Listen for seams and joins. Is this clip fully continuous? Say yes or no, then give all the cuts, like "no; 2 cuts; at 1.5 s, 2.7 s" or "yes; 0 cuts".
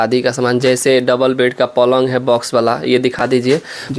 yes; 0 cuts